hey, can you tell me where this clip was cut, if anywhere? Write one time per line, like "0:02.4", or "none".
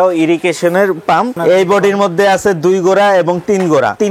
0:01.3